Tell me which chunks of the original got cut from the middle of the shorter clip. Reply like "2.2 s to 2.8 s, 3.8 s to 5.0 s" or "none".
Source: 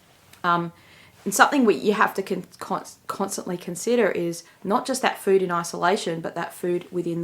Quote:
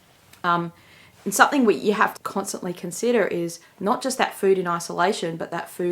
2.1 s to 3.0 s